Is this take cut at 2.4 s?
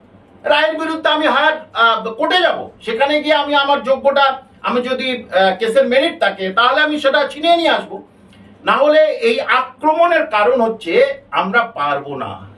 no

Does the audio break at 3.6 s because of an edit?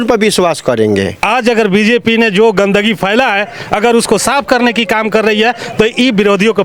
no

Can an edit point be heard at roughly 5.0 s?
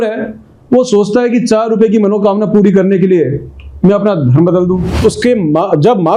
yes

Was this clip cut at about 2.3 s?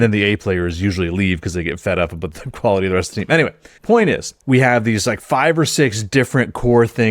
no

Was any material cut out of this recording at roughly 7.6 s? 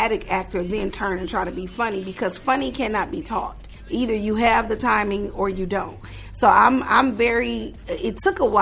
no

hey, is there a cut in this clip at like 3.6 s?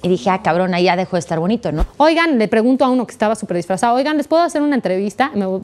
no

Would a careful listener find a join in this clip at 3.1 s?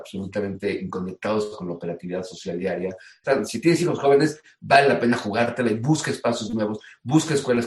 yes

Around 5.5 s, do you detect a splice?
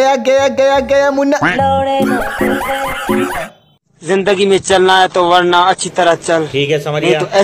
no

